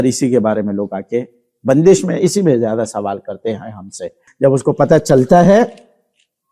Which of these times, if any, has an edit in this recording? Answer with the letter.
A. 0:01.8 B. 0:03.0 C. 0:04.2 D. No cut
C